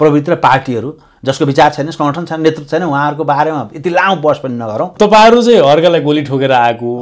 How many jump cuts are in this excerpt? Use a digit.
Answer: 1